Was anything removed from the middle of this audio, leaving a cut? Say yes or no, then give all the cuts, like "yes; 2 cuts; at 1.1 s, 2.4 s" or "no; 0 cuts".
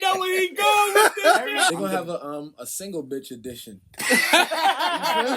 yes; 1 cut; at 1.7 s